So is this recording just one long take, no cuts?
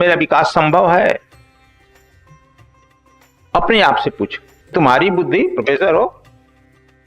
no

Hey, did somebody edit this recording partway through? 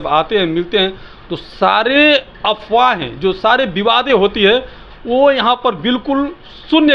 no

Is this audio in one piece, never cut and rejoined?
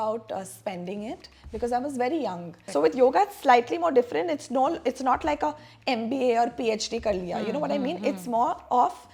no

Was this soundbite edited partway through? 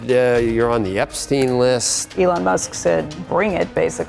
yes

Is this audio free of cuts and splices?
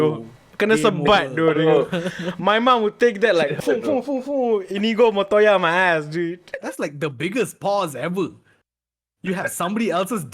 no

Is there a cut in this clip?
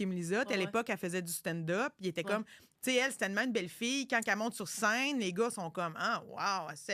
no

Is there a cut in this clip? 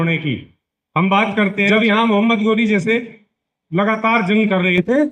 yes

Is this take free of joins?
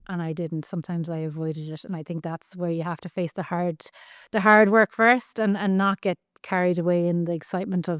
yes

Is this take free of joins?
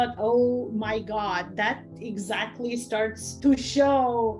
no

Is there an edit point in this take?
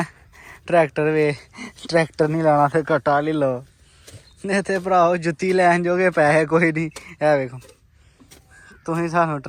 no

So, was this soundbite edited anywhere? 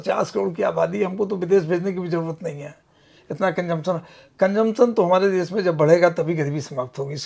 no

